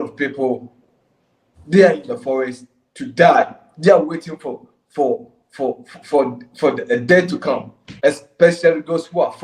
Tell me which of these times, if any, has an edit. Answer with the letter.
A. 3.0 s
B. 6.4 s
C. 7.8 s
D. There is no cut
C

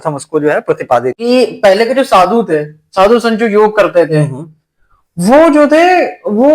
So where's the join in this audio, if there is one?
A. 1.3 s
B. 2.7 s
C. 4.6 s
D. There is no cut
A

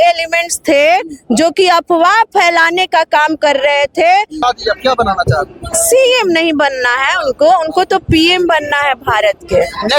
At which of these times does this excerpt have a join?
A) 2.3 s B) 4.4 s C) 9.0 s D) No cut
B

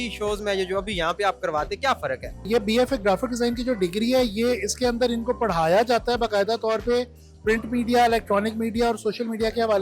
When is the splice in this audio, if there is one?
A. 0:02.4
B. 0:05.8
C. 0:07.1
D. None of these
A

